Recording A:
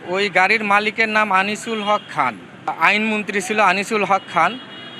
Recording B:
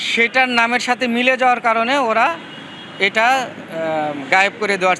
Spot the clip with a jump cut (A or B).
A